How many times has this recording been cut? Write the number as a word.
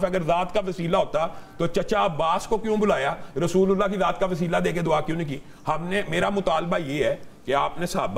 zero